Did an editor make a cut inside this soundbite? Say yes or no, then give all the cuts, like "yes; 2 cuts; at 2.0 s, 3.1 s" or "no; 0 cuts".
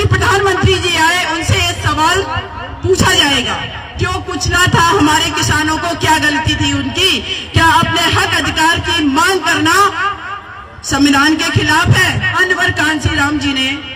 yes; 1 cut; at 12.4 s